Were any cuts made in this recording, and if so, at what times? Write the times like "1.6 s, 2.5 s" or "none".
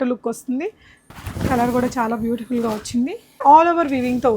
1.0 s, 3.4 s

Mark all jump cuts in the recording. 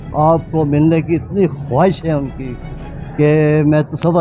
none

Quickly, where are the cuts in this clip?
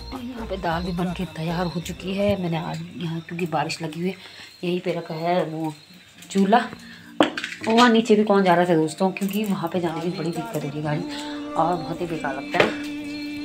none

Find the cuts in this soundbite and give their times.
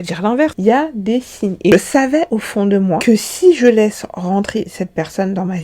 1.7 s

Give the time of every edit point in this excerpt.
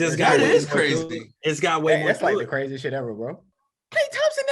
3.5 s

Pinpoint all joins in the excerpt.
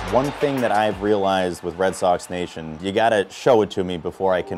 2.8 s

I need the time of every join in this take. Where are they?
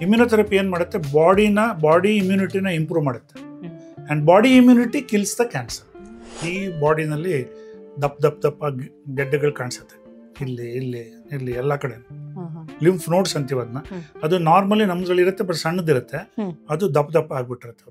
6.4 s

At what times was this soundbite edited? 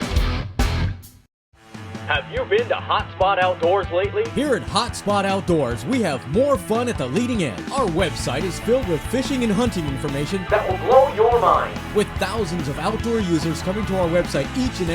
1.2 s

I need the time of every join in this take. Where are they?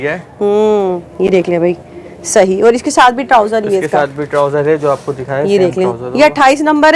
none

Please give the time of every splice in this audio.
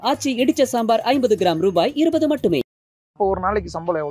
3.1 s

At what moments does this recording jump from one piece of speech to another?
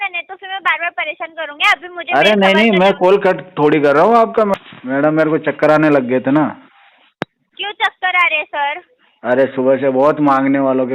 4.5 s

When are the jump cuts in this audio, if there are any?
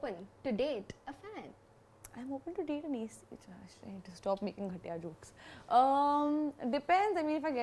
none

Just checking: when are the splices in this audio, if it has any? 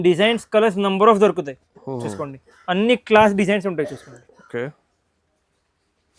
none

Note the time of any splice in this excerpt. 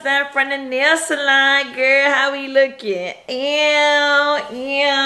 none

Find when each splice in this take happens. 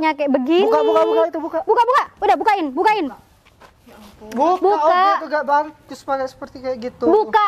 none

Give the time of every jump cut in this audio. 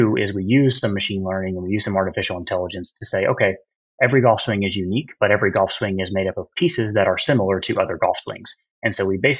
none

